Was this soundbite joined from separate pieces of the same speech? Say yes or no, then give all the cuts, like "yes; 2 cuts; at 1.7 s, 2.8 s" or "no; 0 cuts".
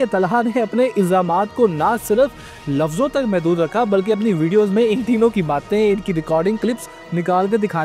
no; 0 cuts